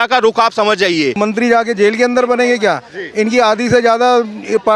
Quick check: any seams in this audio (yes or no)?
yes